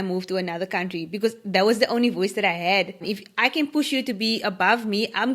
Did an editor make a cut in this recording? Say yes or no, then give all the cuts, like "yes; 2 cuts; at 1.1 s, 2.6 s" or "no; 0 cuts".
yes; 1 cut; at 3.0 s